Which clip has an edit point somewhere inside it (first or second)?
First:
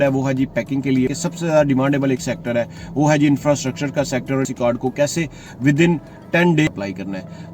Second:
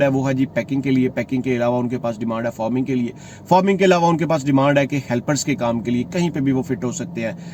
first